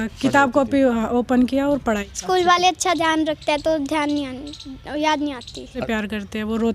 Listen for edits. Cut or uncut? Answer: cut